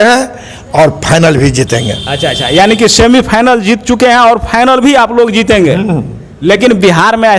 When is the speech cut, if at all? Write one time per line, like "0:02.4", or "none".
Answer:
none